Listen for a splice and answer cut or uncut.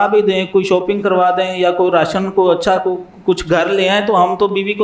uncut